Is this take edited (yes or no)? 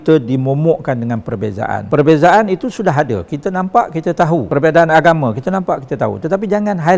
yes